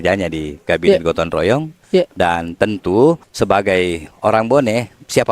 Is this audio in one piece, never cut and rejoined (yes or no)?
no